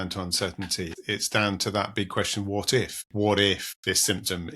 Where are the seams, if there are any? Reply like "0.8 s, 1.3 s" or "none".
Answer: 0.9 s, 3.0 s, 3.7 s